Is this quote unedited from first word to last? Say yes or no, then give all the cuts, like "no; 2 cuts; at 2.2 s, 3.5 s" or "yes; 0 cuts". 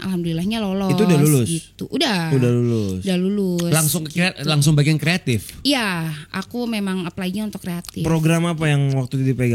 yes; 0 cuts